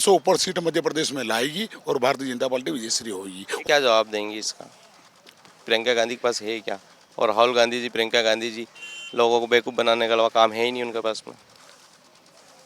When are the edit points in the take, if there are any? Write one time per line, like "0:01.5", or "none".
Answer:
0:03.6